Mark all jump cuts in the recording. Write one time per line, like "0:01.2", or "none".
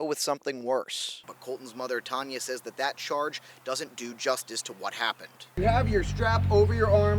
0:01.3
0:05.5